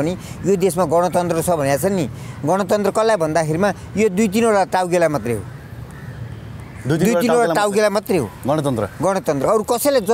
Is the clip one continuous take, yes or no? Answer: yes